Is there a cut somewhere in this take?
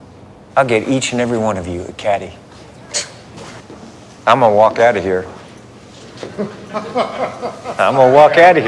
no; 0 cuts

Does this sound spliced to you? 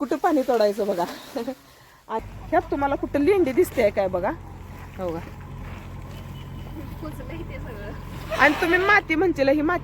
yes; 1 cut; at 2.2 s

